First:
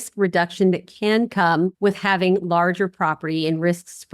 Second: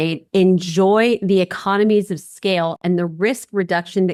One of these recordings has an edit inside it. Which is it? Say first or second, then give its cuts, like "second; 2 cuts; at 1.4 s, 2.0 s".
first; 1 cut; at 1.7 s